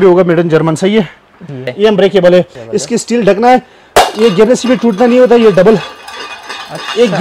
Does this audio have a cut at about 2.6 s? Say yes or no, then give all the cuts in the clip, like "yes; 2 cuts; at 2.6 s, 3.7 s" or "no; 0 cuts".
yes; 2 cuts; at 1.7 s, 2.6 s